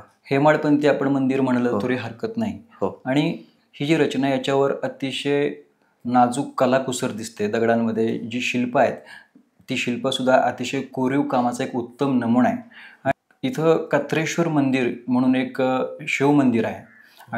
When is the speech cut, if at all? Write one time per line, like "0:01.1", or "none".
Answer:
0:13.1